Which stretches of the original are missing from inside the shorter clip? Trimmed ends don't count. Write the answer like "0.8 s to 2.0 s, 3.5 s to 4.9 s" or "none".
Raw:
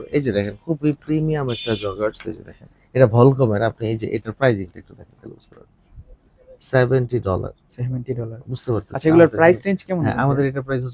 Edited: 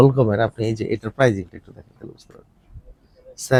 none